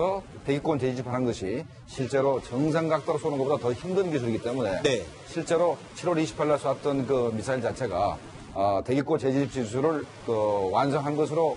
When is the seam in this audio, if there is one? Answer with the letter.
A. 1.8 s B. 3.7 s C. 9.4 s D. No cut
D